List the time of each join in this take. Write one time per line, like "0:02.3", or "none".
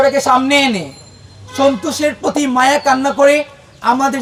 none